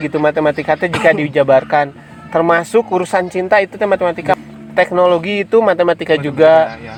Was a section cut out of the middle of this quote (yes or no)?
no